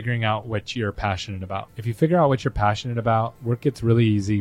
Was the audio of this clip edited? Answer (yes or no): yes